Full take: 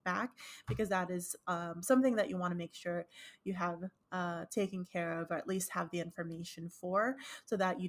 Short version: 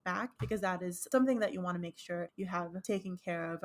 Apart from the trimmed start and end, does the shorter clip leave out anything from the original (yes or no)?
yes